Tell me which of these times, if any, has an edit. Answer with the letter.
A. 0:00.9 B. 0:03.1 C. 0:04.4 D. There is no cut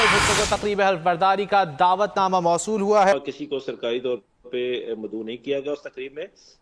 B